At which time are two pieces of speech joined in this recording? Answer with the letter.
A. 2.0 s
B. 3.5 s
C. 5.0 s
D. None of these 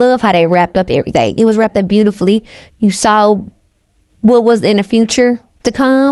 D